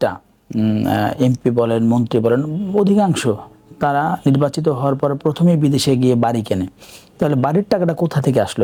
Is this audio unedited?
yes; 0 cuts

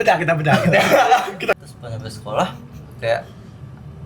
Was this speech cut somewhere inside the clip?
yes; 1 cut; at 1.5 s

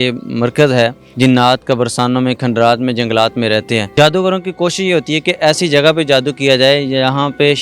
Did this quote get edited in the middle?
yes; 2 cuts; at 1.0 s, 3.9 s

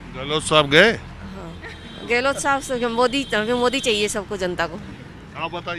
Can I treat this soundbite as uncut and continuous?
yes; 0 cuts

